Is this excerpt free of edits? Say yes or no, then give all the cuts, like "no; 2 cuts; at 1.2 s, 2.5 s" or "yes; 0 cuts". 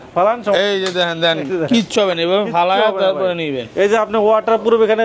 yes; 0 cuts